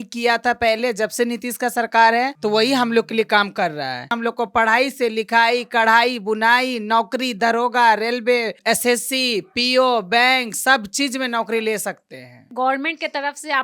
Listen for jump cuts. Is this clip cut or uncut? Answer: cut